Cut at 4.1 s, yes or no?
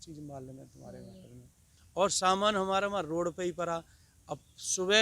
no